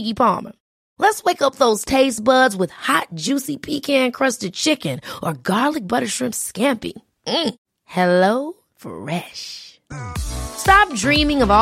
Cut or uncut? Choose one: uncut